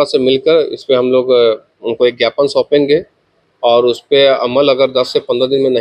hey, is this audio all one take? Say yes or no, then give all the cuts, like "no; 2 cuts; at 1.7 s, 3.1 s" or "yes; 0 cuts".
yes; 0 cuts